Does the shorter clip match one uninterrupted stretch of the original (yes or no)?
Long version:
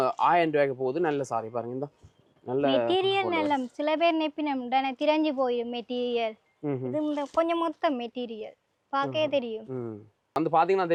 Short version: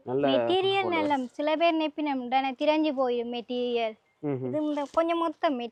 yes